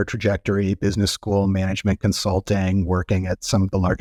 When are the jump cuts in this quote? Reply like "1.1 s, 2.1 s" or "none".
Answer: none